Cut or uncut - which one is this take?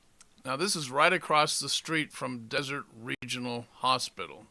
uncut